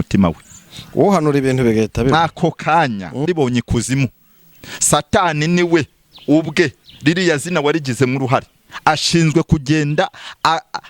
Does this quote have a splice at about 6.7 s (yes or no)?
no